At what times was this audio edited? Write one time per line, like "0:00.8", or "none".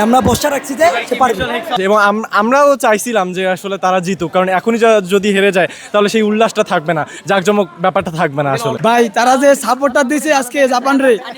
0:01.7
0:08.8